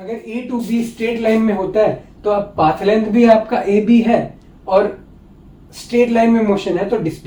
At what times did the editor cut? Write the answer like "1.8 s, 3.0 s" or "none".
none